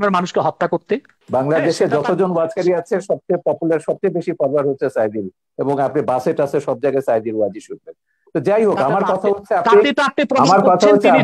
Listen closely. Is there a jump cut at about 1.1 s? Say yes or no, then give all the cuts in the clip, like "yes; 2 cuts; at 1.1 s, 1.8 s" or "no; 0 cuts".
yes; 1 cut; at 1.1 s